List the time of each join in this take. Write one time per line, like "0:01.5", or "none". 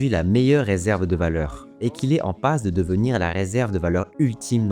0:01.6